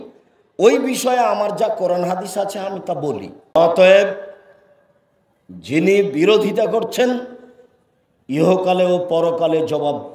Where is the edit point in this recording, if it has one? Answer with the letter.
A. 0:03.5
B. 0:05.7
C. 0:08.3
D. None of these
A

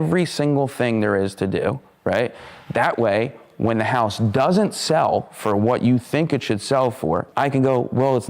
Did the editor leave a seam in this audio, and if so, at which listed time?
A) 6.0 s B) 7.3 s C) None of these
B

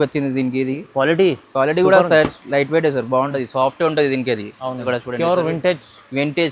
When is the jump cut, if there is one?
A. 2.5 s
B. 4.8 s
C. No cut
B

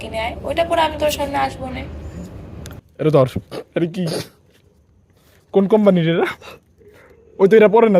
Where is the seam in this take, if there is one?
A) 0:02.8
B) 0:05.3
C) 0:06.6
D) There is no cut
A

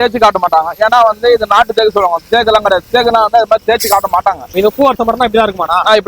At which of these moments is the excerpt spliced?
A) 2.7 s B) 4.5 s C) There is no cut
B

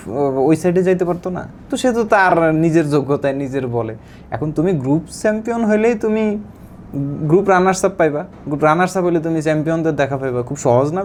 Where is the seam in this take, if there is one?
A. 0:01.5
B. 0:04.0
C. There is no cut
C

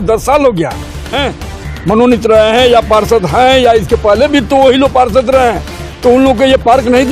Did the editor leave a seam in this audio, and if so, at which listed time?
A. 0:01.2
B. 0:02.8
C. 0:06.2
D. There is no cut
A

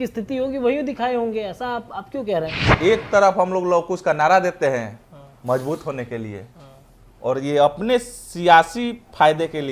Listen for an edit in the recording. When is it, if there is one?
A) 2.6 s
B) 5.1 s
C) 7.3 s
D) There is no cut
A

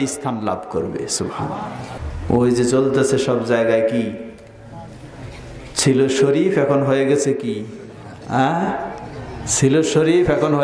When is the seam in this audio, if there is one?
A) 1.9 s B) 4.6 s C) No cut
A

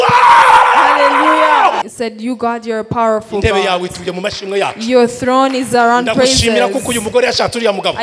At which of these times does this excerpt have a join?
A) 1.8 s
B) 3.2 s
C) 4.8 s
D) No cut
A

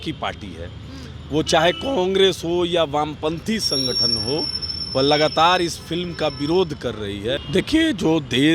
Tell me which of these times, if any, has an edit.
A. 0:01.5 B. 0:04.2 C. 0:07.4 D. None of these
C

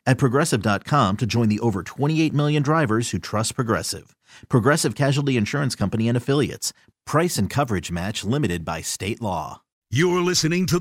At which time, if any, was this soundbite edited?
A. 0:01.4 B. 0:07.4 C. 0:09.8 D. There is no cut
C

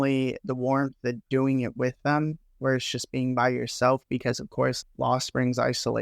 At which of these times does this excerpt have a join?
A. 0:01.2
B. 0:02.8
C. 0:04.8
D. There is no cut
C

